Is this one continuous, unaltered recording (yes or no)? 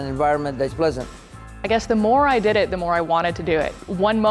no